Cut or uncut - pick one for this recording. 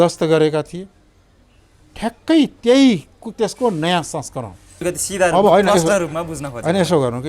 cut